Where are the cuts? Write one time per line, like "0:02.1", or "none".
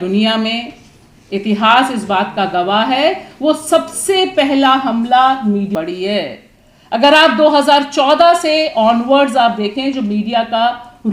0:05.7